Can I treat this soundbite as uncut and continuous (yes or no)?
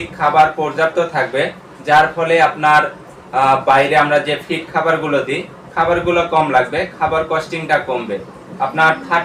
yes